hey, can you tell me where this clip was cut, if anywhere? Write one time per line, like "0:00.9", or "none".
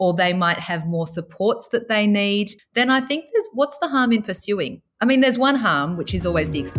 0:02.6